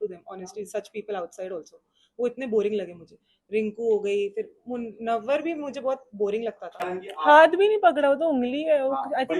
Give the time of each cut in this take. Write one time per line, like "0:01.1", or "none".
0:06.9